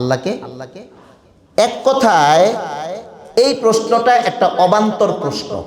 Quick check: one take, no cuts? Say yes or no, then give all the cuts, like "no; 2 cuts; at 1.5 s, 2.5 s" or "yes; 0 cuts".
yes; 0 cuts